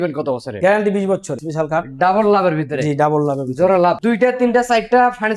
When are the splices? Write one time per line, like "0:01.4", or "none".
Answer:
0:01.4
0:04.0